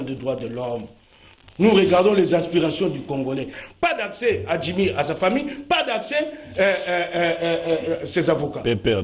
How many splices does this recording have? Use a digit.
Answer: 1